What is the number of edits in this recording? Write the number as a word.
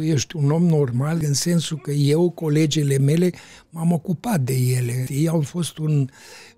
two